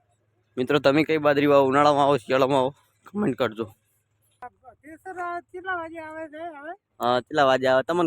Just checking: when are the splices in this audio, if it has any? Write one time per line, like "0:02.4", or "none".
0:04.4